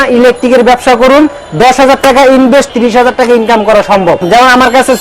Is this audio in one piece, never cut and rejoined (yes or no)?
no